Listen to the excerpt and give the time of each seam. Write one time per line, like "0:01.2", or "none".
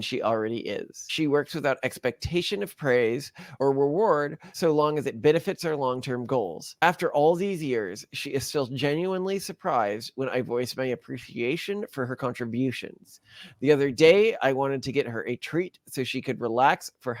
0:01.1